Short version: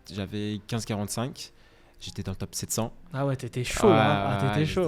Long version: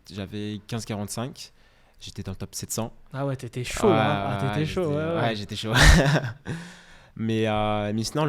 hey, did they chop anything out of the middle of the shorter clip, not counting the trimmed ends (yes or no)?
no